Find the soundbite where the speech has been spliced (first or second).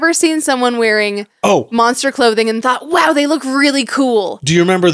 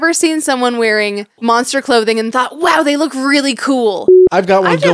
second